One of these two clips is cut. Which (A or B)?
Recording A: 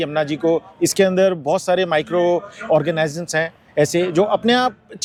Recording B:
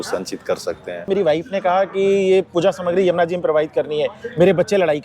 B